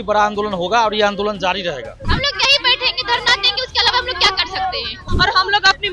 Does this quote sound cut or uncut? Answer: cut